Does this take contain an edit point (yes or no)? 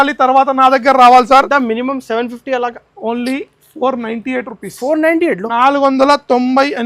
yes